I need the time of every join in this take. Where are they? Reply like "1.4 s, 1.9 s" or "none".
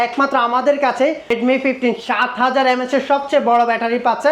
1.3 s